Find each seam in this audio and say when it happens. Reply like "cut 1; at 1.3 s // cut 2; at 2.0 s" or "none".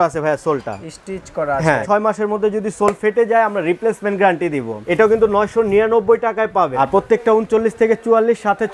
cut 1; at 1.8 s // cut 2; at 4.8 s // cut 3; at 6.7 s

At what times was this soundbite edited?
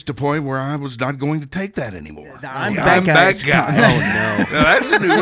cut 1; at 2.6 s

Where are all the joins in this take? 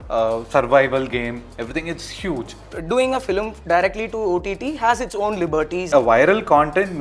cut 1; at 2.7 s // cut 2; at 5.8 s

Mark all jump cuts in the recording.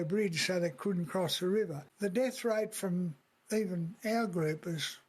cut 1; at 1.8 s

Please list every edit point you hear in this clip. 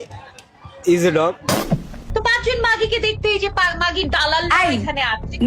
cut 1; at 2.0 s

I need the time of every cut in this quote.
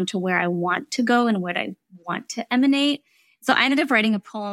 none

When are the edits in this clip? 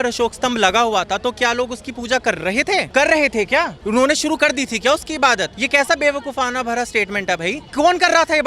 cut 1; at 2.9 s // cut 2; at 3.8 s // cut 3; at 5.6 s // cut 4; at 7.6 s

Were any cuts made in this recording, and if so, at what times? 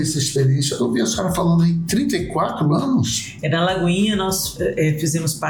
none

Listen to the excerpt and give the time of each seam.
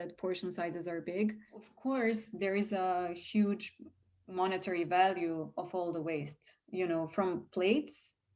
cut 1; at 1.7 s

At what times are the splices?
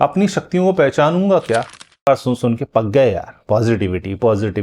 cut 1; at 1.9 s

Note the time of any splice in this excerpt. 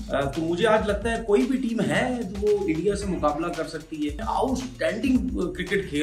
cut 1; at 4.2 s

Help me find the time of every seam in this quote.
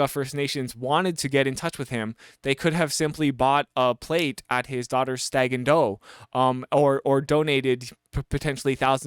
none

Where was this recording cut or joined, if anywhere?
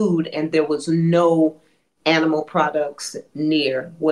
none

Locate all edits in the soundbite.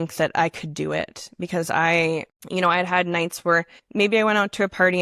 cut 1; at 2.4 s // cut 2; at 3.8 s

